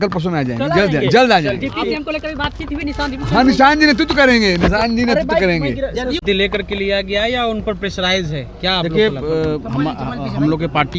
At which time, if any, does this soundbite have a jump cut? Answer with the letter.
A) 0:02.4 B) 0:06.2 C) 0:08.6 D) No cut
D